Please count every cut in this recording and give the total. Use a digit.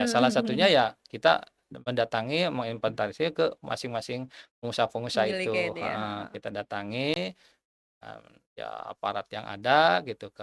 0